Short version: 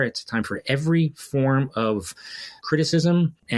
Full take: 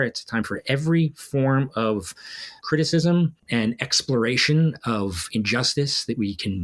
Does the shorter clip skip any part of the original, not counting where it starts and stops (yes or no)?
no